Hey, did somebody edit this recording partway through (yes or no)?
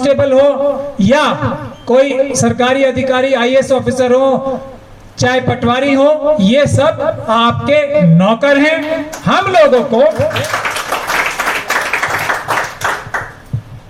no